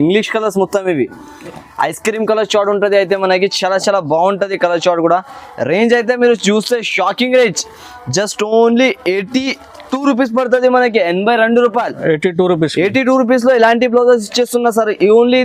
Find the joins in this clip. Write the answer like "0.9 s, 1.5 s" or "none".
none